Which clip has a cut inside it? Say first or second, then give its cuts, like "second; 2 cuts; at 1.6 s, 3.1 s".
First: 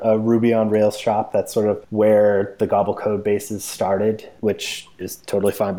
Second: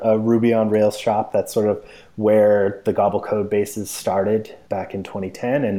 first; 2 cuts; at 1.8 s, 4.3 s